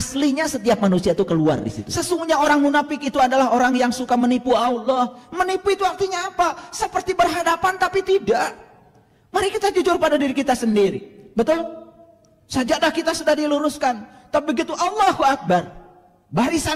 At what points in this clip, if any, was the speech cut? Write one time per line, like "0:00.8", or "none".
0:01.9